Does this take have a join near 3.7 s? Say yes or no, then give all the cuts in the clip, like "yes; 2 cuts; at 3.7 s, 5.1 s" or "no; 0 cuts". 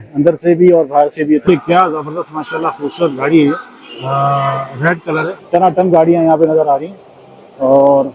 no; 2 cuts; at 1.4 s, 5.3 s